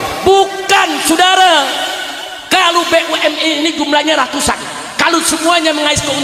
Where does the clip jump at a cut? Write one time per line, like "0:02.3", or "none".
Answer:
none